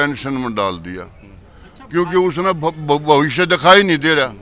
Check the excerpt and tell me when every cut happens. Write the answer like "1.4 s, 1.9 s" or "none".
none